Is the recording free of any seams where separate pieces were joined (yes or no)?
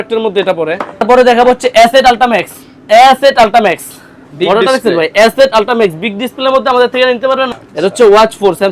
no